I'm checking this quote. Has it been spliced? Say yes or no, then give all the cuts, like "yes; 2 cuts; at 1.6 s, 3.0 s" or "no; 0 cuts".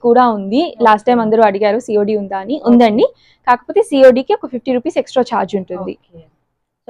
no; 0 cuts